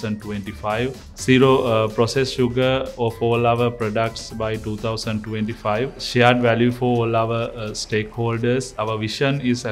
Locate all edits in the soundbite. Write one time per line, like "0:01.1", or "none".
0:02.9
0:06.0
0:08.7